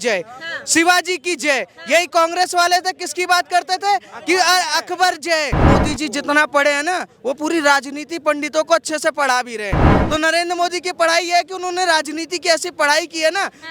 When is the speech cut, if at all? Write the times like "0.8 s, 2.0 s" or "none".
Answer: 5.6 s, 9.9 s